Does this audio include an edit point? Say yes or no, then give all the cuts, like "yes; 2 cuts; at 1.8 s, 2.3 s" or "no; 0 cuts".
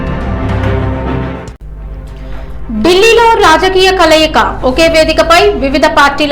yes; 1 cut; at 1.2 s